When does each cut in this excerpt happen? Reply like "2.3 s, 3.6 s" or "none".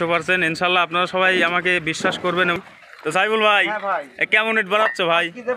2.6 s